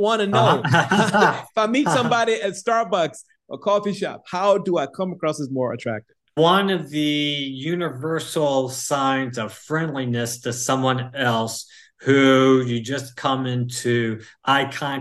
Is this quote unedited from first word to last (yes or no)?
no